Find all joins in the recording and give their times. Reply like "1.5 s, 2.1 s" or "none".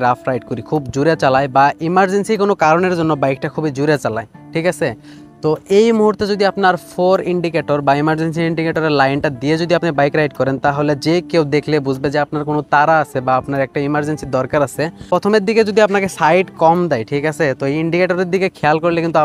none